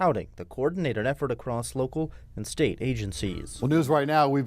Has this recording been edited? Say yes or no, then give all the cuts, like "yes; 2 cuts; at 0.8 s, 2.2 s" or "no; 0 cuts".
yes; 1 cut; at 3.4 s